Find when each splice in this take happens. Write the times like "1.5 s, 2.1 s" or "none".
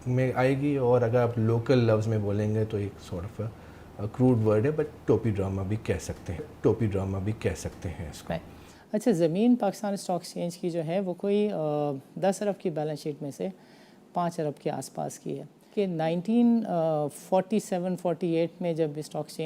8.5 s, 15.6 s